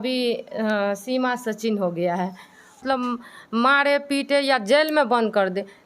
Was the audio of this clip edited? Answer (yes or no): yes